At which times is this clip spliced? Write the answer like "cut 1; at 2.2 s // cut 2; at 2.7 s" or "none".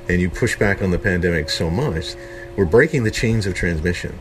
cut 1; at 2.1 s